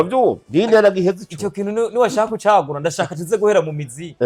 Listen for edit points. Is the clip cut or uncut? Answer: uncut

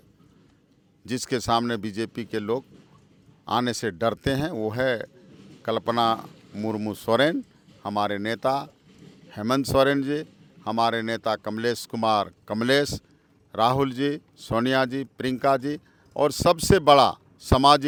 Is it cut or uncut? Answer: uncut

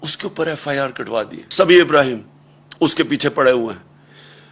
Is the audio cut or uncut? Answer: cut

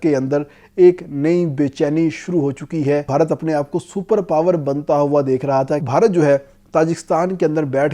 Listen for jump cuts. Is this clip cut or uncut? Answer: cut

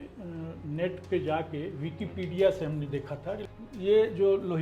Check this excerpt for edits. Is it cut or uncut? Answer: cut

